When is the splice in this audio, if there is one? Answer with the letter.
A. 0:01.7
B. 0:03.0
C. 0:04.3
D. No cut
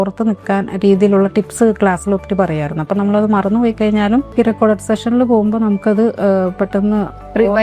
C